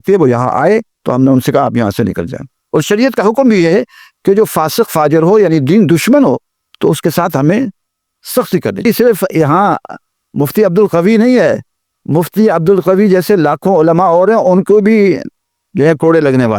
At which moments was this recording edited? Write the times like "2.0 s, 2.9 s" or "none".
8.9 s